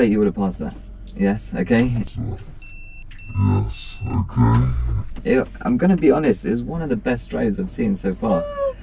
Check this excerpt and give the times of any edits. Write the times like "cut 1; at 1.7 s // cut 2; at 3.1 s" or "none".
none